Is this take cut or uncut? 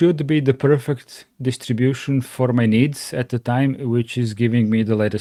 uncut